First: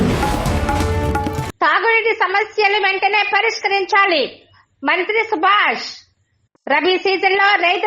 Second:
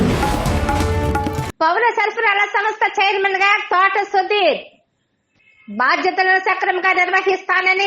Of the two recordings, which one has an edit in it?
second; 1 cut; at 1.4 s

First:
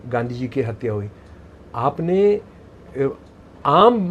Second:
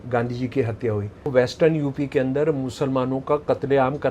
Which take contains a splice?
second; 1 cut; at 1.3 s

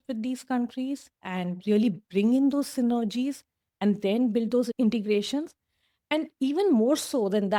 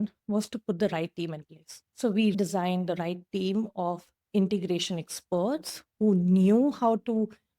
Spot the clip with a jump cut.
second; 1 cut; at 2.4 s

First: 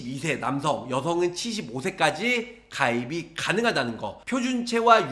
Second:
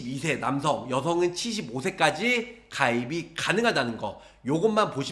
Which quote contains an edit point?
first; 1 cut; at 4.1 s

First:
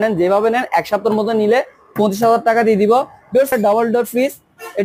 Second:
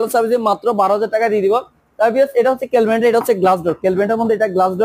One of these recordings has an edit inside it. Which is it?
first; 1 cut; at 3.5 s

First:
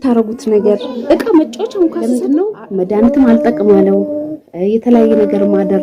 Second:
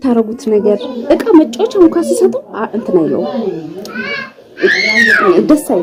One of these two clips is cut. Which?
first; 1 cut; at 2.0 s

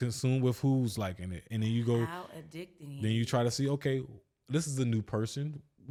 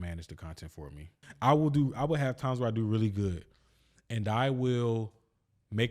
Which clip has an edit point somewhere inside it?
second; 1 cut; at 1.2 s

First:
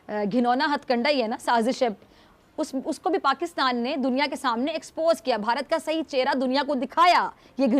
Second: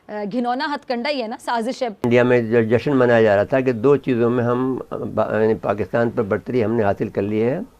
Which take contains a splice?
second; 1 cut; at 2.0 s

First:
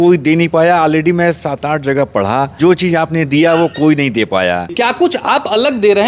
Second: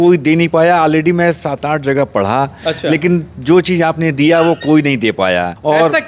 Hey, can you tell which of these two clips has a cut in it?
first; 2 cuts; at 2.5 s, 4.6 s

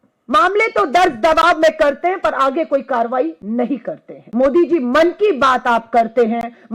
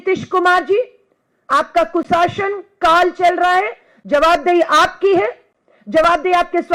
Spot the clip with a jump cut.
first; 1 cut; at 4.2 s

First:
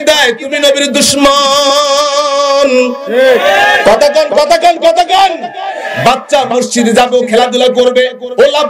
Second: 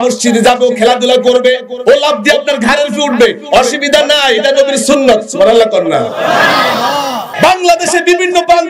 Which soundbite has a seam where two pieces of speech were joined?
second; 1 cut; at 7.2 s

